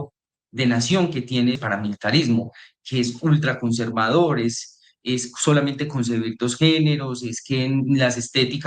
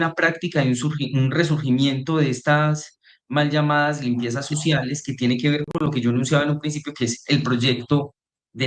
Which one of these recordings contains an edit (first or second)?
first